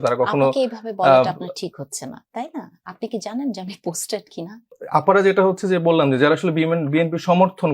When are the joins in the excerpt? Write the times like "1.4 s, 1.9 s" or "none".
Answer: 4.6 s